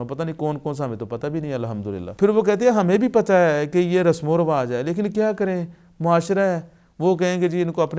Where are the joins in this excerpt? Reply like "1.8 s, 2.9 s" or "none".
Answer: 2.1 s